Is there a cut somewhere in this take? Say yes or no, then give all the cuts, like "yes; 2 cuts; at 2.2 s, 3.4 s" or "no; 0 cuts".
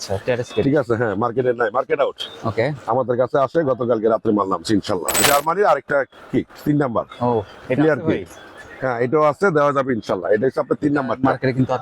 yes; 1 cut; at 5.2 s